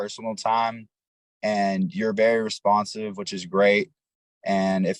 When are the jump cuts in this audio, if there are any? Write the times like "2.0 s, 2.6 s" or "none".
none